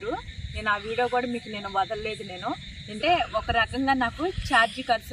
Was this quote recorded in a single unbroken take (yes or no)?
no